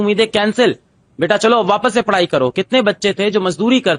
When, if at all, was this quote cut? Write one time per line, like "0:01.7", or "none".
none